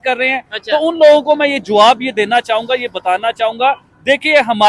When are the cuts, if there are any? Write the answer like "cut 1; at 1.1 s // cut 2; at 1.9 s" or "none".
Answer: none